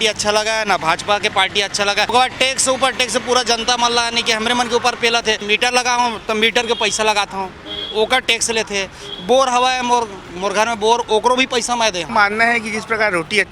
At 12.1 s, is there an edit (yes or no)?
yes